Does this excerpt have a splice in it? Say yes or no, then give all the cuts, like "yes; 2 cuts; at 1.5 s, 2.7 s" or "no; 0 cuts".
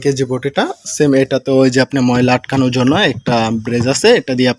no; 0 cuts